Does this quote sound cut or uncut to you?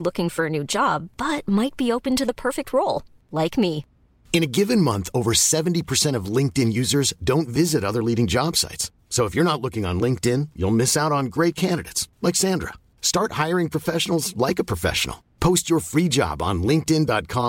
uncut